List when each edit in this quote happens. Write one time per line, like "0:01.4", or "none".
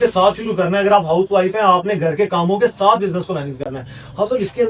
none